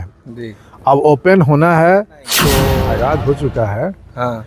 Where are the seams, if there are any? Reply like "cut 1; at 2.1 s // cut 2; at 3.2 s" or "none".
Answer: cut 1; at 2.6 s